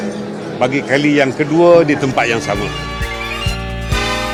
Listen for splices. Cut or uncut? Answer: uncut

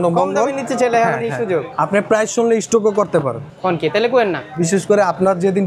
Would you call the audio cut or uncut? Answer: cut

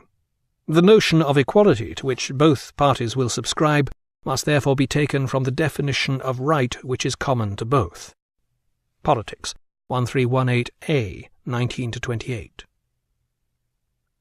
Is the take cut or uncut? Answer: uncut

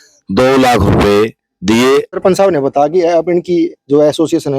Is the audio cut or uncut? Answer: cut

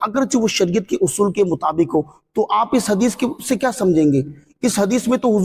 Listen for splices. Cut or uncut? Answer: uncut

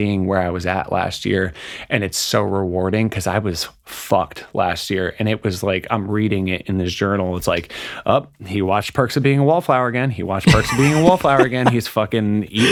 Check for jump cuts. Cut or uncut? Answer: uncut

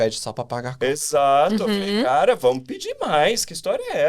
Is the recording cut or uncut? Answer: uncut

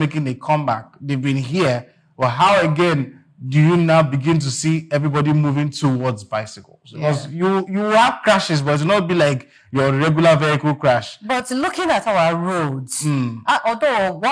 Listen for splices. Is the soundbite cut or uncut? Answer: uncut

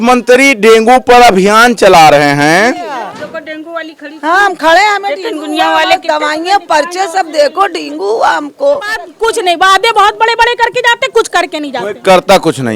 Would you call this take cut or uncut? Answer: cut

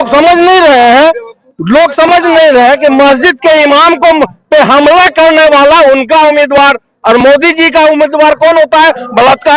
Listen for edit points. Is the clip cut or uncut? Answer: uncut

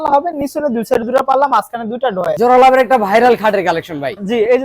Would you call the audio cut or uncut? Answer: cut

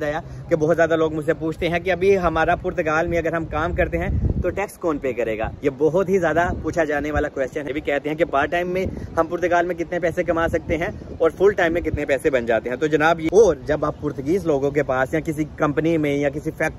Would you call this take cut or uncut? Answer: cut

